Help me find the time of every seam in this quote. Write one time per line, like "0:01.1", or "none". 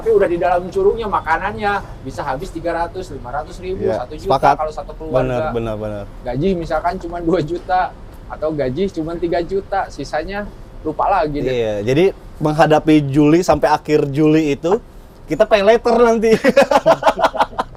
none